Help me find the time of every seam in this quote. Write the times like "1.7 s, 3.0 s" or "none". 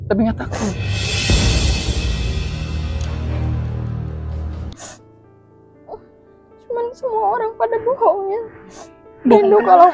4.7 s